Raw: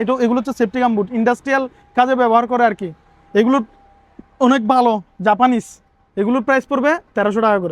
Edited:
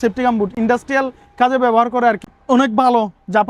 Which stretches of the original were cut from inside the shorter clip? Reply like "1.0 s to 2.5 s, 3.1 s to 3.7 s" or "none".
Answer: 2.9 s to 4.2 s